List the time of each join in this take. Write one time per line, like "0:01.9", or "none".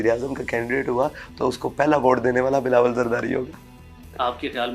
none